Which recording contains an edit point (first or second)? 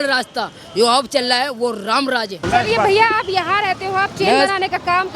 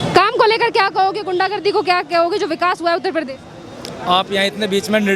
first